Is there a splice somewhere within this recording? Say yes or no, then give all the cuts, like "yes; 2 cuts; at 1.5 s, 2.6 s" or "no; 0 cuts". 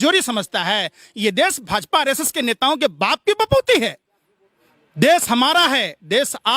no; 0 cuts